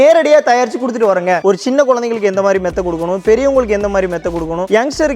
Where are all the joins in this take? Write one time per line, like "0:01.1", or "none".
0:01.4